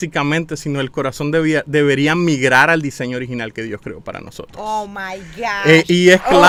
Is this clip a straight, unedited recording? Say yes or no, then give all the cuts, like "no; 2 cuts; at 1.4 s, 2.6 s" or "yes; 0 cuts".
yes; 0 cuts